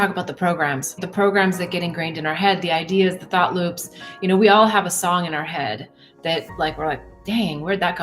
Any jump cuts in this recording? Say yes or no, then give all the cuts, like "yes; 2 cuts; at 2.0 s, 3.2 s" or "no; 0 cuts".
yes; 1 cut; at 1.0 s